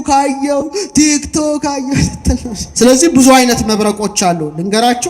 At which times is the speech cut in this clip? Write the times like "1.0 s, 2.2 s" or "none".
2.6 s